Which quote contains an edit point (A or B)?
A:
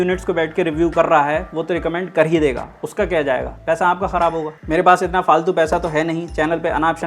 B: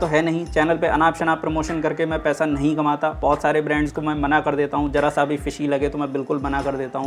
A